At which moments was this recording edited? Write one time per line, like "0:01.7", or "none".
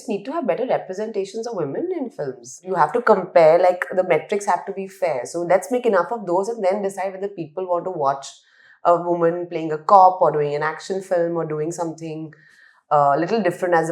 0:02.6